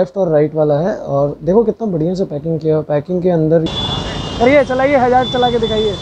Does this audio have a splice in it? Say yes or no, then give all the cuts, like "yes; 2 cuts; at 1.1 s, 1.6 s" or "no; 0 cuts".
yes; 1 cut; at 3.7 s